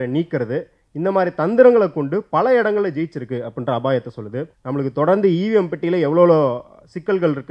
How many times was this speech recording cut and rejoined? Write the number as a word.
one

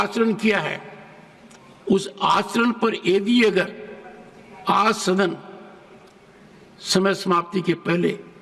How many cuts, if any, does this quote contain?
zero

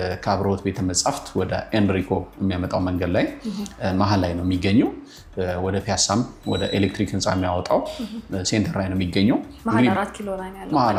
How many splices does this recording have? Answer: zero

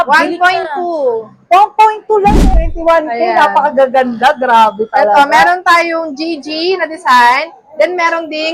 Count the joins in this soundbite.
one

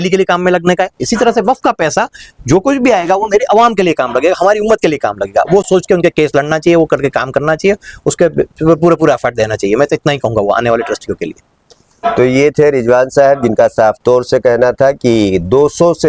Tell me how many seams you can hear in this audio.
zero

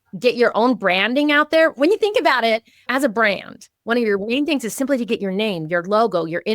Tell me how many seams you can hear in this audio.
one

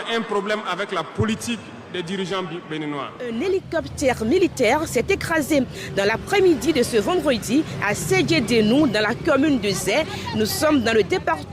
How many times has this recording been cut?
one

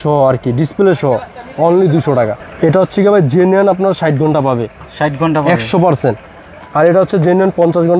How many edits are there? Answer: one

